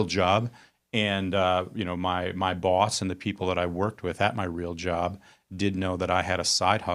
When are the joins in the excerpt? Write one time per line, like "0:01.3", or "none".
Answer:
none